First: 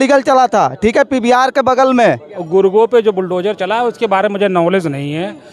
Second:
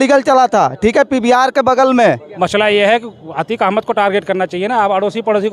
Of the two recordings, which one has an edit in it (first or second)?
second